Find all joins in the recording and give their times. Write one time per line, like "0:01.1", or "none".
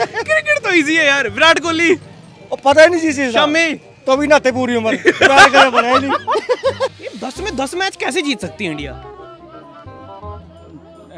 0:06.9

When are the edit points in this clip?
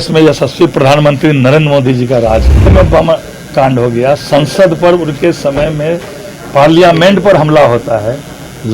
0:02.7

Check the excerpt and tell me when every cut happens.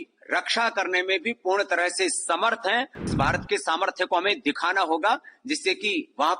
0:03.1

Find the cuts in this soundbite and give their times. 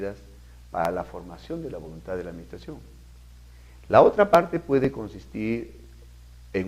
0:01.4

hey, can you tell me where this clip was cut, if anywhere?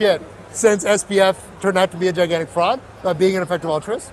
none

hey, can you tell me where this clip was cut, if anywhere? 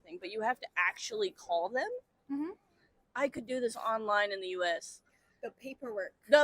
0:03.0

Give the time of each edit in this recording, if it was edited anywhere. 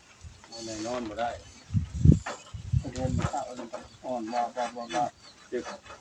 none

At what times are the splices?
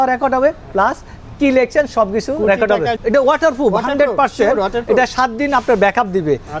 0:03.0

